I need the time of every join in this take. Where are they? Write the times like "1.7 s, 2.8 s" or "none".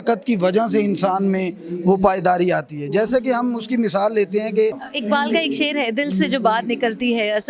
4.9 s